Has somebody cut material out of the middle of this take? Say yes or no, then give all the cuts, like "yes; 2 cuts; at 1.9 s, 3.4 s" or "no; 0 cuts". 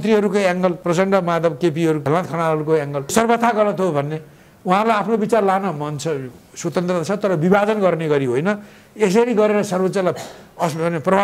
yes; 3 cuts; at 0.8 s, 2.1 s, 3.1 s